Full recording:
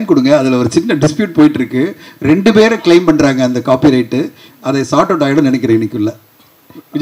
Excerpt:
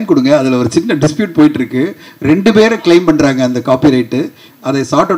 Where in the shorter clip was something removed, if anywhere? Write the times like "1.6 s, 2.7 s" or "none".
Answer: none